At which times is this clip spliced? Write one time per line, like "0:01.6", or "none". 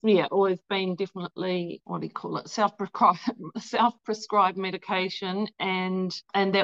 none